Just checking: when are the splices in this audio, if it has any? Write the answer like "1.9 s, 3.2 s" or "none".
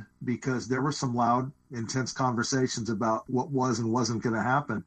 0.8 s, 1.7 s, 3.2 s